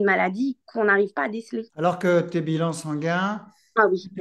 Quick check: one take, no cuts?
yes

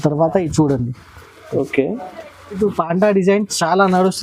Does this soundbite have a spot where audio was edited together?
yes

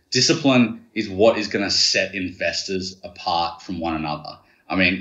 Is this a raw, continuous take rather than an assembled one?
yes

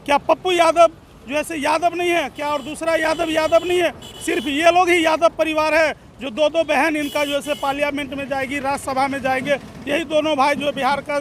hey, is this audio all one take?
yes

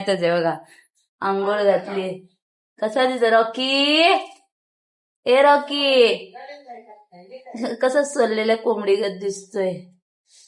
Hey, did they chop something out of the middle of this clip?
no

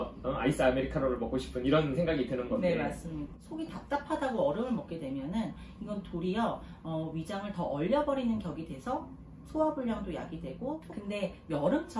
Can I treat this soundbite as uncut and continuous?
no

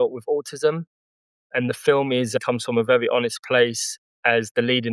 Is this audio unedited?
yes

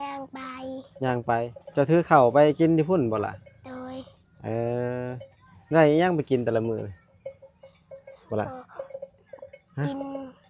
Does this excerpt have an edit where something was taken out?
yes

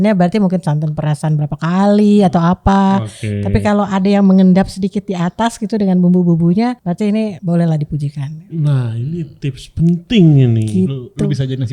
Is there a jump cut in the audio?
yes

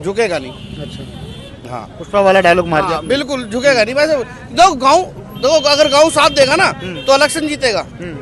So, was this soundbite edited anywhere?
no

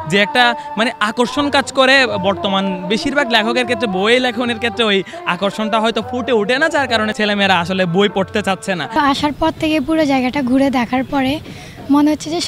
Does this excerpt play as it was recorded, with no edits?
no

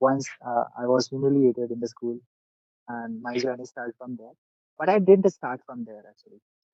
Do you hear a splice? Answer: no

